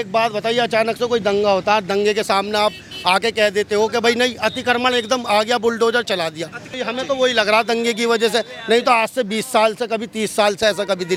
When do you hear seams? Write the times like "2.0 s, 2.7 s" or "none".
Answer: none

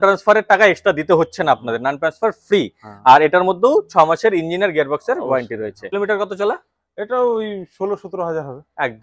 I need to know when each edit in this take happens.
5.9 s

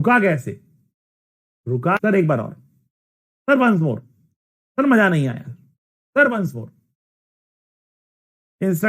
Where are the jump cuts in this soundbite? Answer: 2.0 s

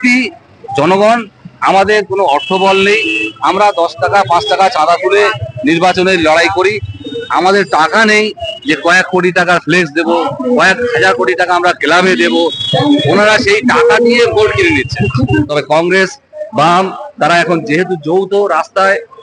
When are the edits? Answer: 15.2 s

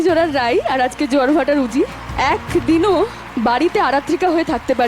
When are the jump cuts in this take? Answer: 2.0 s, 3.2 s

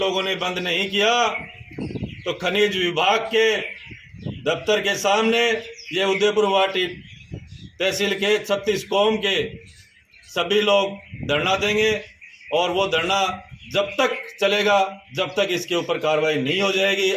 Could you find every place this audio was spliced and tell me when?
none

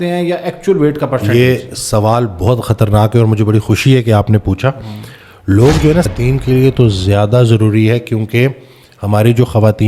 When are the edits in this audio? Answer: 6.1 s

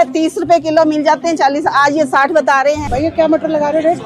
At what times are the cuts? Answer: 2.8 s

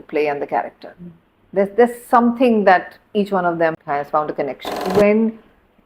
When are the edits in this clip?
3.8 s, 4.8 s

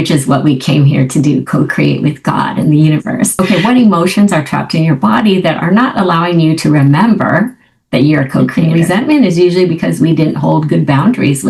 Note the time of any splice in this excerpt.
3.3 s, 8.5 s

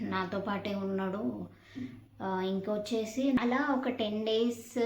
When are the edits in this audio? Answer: 3.4 s

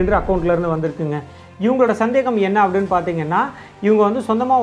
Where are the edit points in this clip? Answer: none

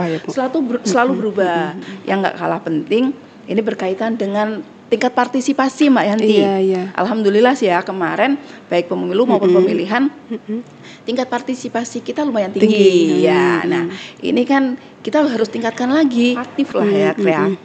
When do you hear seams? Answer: 1.9 s, 16.5 s

